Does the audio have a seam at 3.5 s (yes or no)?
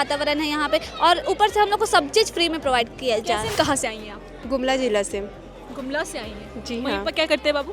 yes